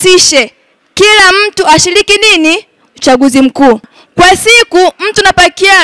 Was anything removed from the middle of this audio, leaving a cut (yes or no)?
yes